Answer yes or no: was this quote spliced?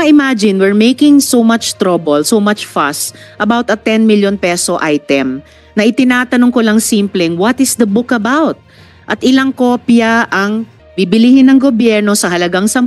no